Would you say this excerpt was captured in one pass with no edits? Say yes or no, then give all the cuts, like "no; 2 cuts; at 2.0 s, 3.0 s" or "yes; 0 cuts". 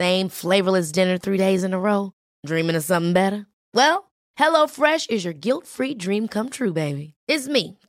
yes; 0 cuts